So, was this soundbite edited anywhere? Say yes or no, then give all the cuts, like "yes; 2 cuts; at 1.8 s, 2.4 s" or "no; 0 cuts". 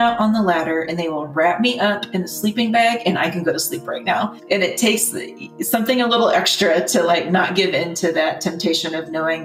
yes; 1 cut; at 4.4 s